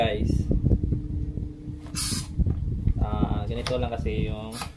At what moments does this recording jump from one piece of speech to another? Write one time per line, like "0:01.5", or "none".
none